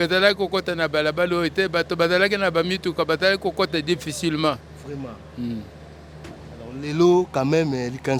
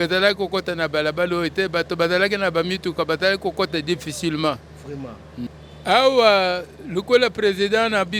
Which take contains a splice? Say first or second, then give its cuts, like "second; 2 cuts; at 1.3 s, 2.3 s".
second; 1 cut; at 5.5 s